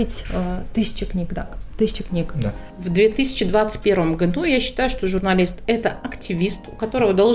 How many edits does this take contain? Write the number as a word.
one